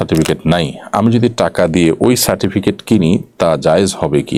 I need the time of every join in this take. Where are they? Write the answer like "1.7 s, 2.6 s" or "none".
none